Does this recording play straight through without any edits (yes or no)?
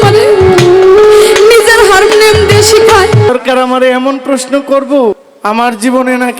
no